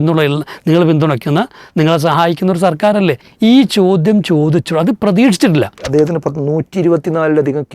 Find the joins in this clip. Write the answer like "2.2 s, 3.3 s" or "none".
3.3 s, 5.9 s